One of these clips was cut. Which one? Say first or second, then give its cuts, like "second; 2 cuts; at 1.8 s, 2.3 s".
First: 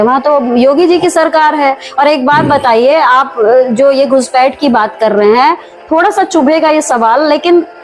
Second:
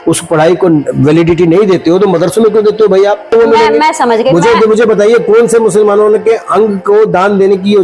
second; 1 cut; at 3.3 s